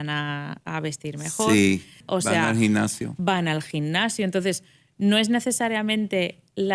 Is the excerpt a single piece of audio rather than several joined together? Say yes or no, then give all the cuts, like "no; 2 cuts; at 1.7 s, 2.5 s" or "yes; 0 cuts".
no; 1 cut; at 2.0 s